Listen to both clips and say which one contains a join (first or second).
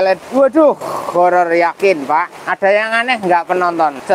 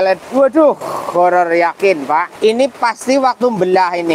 second